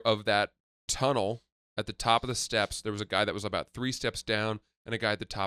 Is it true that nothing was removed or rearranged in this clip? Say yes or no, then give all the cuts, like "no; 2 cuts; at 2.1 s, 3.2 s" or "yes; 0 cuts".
yes; 0 cuts